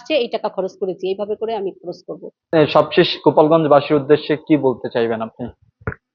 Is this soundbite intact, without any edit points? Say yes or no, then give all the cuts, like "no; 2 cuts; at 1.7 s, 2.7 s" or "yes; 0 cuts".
yes; 0 cuts